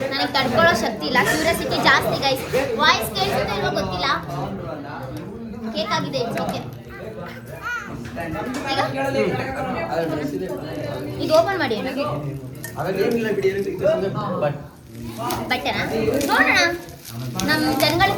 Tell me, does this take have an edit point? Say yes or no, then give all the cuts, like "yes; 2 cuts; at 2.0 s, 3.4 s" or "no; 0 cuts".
no; 0 cuts